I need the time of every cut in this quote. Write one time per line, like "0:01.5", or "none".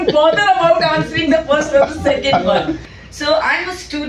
0:02.9